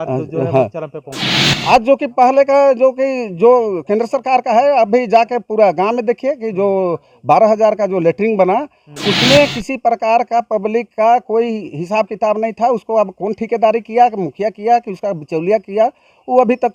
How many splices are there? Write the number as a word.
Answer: zero